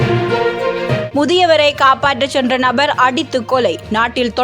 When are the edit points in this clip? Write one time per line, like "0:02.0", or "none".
0:01.1